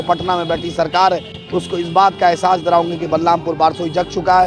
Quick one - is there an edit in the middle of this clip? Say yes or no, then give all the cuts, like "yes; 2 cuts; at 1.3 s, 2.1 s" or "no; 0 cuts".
no; 0 cuts